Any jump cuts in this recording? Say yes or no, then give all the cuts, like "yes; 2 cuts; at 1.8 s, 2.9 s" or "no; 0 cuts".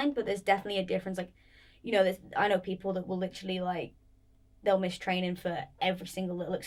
no; 0 cuts